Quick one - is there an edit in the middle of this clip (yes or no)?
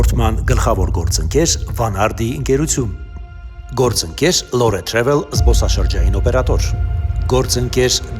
no